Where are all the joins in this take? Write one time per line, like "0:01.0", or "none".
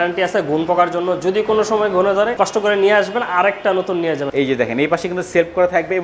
0:02.3
0:04.3

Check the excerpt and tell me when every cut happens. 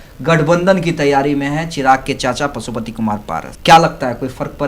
0:03.5

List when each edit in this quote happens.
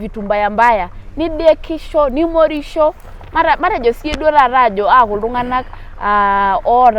none

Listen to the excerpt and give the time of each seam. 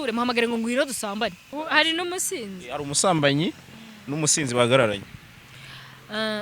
0:01.5

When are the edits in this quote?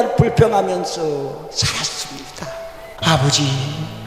0:03.0

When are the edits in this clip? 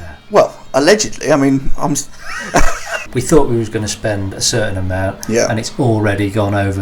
0:02.9

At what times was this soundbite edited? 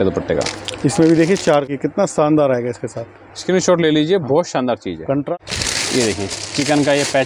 0:01.7
0:05.3

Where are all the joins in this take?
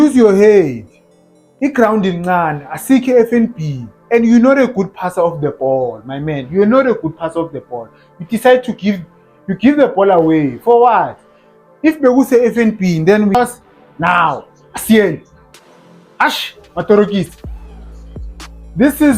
0:13.4

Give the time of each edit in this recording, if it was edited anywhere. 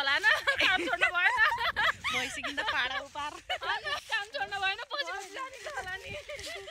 0:04.0

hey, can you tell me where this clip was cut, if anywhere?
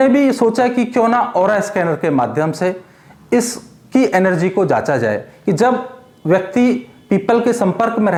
none

